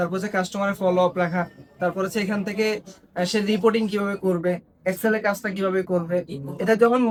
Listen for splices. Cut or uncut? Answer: uncut